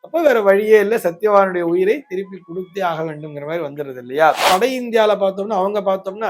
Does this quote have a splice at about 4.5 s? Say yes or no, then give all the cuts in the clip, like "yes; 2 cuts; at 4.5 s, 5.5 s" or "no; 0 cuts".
yes; 1 cut; at 4.5 s